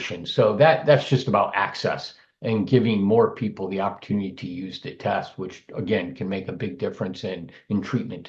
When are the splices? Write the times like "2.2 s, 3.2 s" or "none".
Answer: none